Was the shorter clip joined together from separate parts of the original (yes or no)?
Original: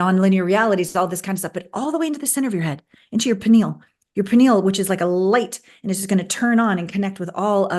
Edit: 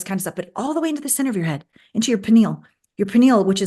no